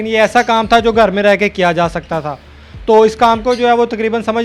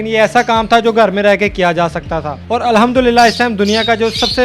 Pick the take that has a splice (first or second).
second